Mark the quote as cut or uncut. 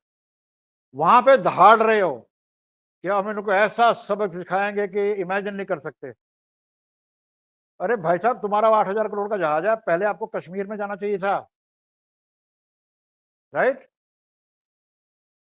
uncut